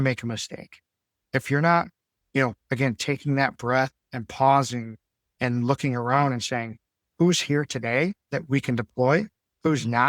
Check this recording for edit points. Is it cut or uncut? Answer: cut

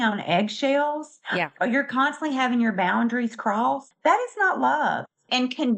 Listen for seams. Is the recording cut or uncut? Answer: uncut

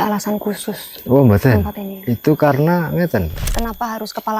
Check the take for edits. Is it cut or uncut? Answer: cut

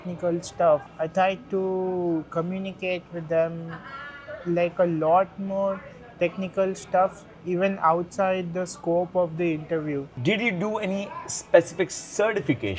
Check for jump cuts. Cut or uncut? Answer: cut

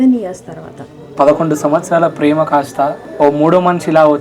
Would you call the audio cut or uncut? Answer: cut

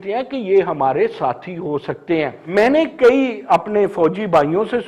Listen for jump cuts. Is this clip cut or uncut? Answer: cut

